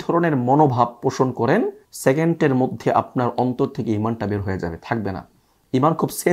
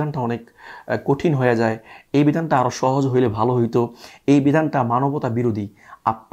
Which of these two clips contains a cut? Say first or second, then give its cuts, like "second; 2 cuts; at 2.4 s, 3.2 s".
first; 1 cut; at 1.8 s